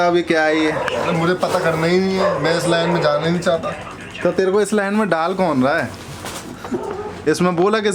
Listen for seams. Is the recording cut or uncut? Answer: uncut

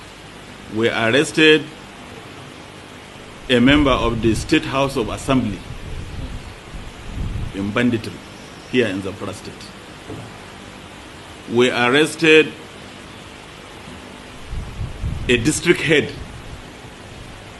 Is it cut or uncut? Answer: uncut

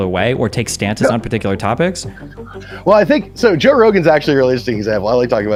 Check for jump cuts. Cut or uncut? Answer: uncut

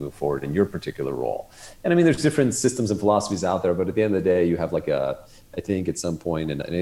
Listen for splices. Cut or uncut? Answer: uncut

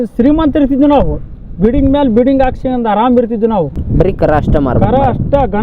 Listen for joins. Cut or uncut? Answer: cut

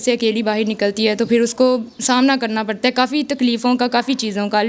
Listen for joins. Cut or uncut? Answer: uncut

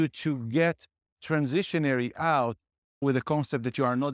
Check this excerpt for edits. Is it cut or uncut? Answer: cut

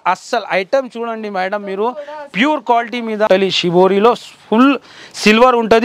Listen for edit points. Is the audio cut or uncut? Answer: cut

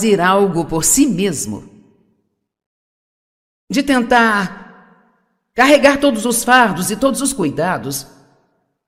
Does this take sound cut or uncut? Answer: uncut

